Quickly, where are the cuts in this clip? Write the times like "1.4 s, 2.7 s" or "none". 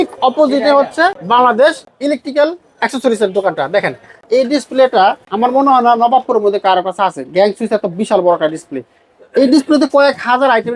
1.2 s, 1.9 s, 4.2 s, 5.3 s